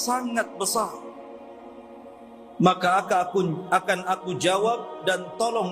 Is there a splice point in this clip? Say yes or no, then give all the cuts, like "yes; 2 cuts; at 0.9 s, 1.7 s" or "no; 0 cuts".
yes; 2 cuts; at 1.1 s, 2.6 s